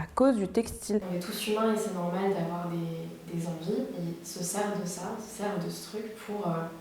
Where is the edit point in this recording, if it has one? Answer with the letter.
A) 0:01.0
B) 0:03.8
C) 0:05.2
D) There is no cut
A